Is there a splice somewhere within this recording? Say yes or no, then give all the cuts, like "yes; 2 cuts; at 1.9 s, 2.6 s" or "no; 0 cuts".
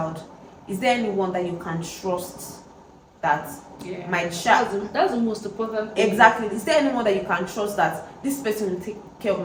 no; 0 cuts